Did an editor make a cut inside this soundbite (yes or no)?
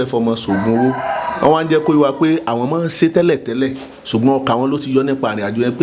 no